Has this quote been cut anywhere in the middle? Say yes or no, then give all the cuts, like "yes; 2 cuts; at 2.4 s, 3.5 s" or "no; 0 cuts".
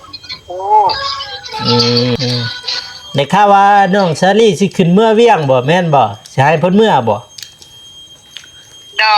yes; 1 cut; at 2.2 s